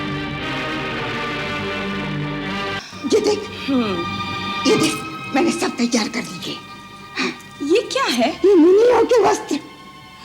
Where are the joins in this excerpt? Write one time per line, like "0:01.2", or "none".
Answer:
0:02.8